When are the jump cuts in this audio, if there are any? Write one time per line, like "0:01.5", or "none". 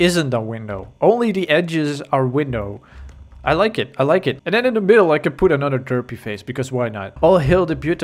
0:07.1